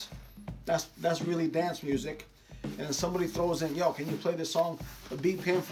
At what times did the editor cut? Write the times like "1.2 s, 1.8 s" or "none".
none